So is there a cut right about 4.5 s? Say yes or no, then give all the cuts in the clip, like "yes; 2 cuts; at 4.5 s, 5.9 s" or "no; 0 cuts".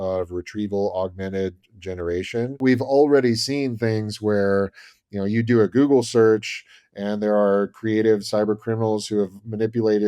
no; 1 cut; at 2.6 s